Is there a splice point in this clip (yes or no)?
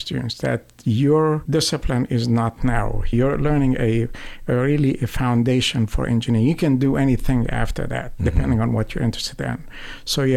yes